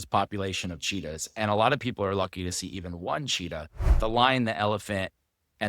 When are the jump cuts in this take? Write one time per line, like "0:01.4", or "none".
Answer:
0:03.8